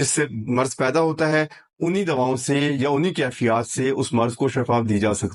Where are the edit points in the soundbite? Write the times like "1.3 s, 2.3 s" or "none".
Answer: none